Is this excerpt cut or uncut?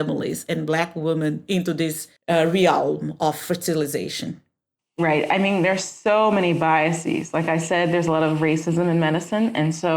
cut